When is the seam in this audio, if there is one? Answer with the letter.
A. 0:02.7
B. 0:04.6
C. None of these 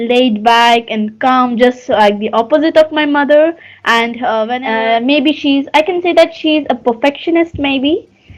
B